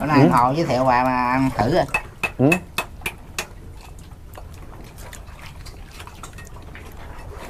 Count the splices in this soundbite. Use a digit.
0